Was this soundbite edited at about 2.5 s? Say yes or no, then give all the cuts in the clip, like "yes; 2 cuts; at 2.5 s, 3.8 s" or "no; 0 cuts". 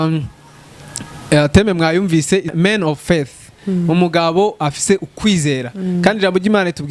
yes; 1 cut; at 2.5 s